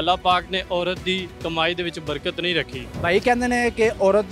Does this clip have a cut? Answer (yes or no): yes